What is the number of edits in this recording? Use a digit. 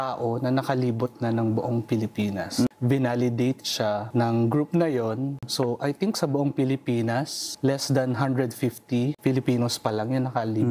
5